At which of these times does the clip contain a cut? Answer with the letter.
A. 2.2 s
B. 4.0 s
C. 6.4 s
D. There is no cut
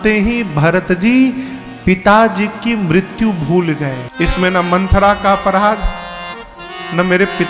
B